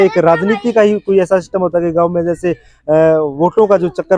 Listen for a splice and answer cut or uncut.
uncut